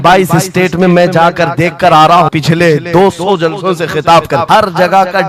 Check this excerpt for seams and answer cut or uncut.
cut